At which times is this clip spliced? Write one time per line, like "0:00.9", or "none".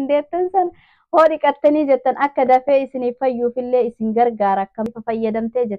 0:04.9